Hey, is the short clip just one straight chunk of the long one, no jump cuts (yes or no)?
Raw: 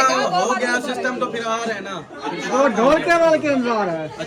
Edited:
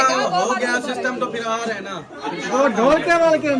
yes